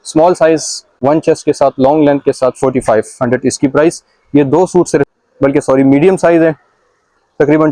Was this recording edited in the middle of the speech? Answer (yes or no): yes